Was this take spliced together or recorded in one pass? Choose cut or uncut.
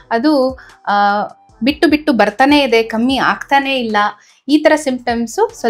uncut